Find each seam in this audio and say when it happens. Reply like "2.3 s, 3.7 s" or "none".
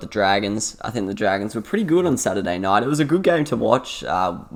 none